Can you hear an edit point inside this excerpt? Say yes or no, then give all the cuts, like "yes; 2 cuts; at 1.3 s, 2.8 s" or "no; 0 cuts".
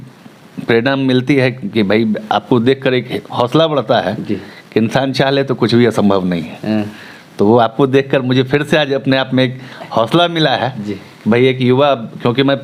no; 0 cuts